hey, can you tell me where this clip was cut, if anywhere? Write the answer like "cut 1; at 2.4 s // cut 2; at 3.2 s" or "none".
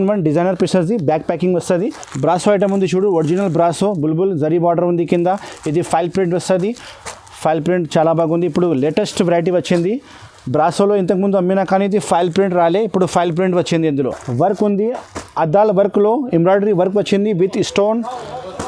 cut 1; at 2.0 s // cut 2; at 14.2 s